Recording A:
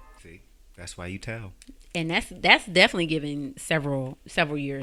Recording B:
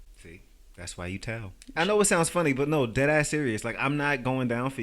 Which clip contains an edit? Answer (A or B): B